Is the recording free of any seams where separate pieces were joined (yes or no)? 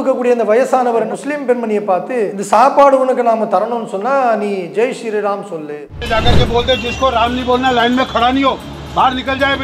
no